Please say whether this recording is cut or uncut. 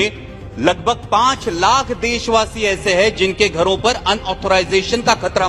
uncut